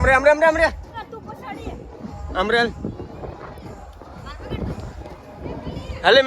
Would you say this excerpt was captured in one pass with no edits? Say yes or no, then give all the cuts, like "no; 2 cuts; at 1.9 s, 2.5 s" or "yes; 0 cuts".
yes; 0 cuts